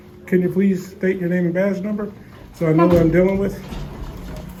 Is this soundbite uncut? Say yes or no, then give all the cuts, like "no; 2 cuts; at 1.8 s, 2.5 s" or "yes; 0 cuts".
yes; 0 cuts